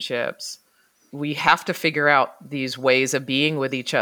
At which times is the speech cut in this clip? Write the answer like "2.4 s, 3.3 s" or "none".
1.1 s